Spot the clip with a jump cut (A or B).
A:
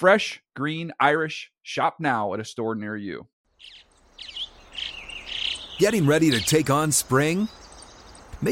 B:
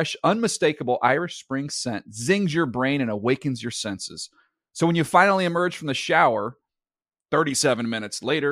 A